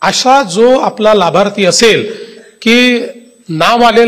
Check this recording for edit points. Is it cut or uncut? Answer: uncut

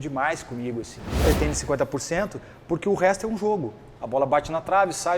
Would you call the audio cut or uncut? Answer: cut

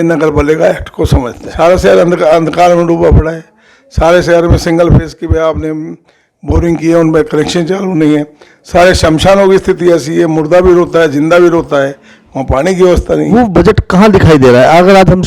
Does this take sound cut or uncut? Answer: cut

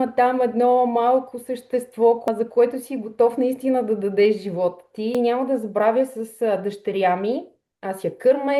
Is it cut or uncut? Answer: cut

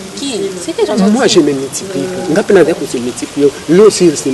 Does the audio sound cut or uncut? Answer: uncut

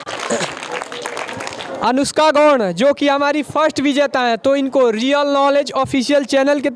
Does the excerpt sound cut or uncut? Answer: cut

